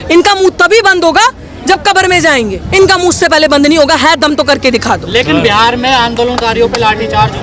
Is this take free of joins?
yes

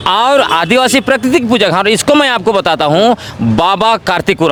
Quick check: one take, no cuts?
yes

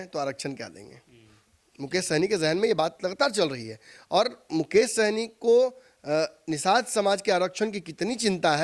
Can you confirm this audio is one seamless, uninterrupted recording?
yes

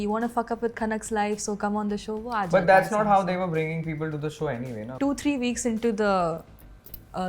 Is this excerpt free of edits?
no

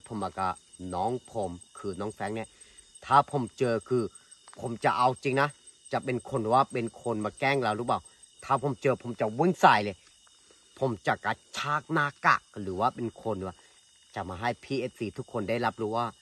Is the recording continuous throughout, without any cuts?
yes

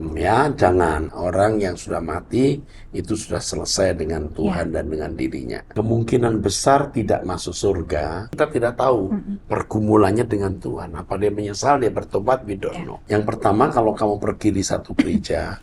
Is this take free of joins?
no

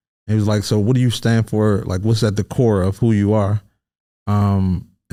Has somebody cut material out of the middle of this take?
no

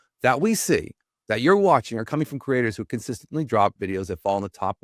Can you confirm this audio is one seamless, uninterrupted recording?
yes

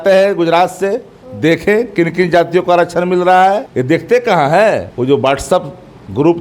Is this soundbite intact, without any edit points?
no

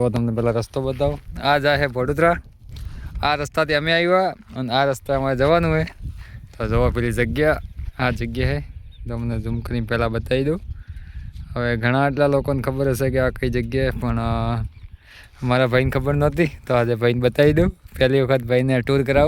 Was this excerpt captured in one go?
yes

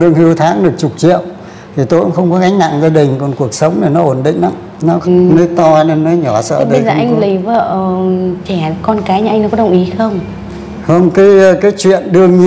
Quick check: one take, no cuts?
no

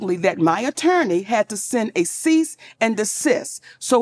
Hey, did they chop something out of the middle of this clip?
no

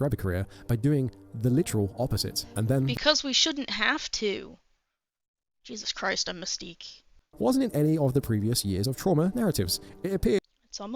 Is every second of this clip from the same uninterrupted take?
no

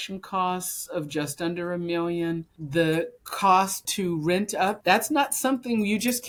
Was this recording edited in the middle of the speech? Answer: no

